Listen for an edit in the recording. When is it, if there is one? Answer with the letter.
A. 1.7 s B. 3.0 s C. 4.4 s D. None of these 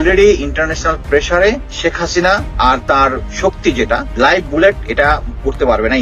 D